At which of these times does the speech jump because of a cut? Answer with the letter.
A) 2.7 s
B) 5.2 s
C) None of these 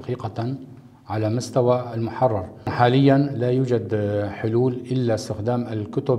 A